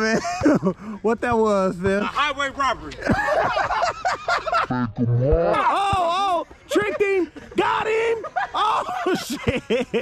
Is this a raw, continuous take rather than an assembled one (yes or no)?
no